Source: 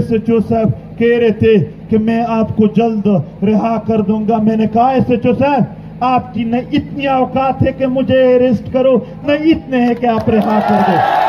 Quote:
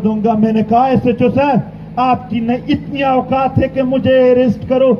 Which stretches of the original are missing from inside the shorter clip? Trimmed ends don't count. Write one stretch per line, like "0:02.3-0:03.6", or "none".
none